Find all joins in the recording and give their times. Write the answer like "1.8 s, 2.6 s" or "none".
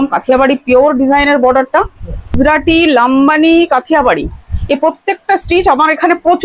2.3 s